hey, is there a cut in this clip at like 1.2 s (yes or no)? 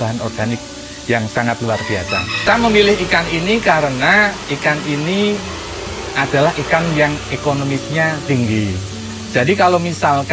no